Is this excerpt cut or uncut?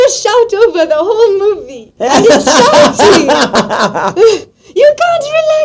cut